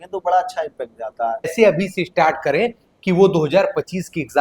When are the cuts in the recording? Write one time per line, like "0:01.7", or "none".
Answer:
0:01.5